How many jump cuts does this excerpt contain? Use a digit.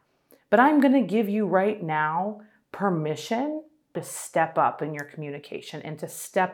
1